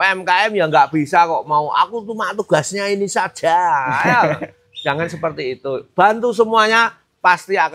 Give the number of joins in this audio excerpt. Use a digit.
0